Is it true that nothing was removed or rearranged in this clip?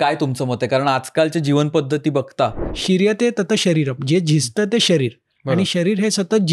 no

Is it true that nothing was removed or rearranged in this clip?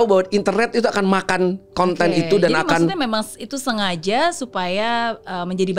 yes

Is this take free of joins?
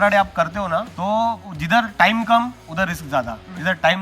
no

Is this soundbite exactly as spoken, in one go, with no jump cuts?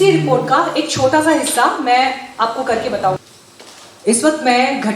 no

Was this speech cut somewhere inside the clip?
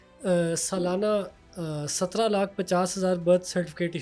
no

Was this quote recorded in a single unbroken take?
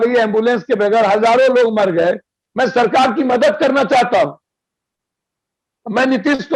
no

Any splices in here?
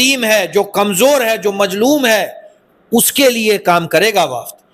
no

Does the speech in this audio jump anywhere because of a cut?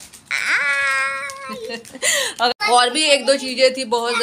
yes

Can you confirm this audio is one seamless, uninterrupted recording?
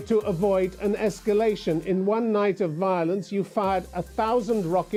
yes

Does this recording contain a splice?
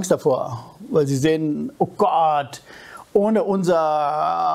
no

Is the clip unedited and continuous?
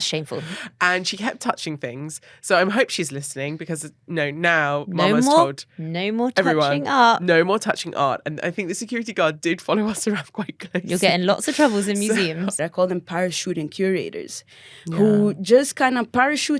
no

